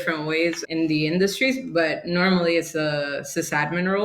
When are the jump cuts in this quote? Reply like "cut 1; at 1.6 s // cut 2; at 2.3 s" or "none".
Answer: none